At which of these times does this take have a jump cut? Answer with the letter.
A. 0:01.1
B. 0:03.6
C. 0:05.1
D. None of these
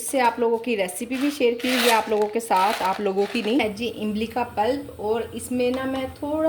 B